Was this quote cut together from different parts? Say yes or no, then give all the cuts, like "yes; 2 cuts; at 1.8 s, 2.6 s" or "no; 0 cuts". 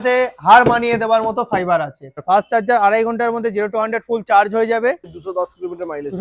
yes; 2 cuts; at 2.2 s, 5.1 s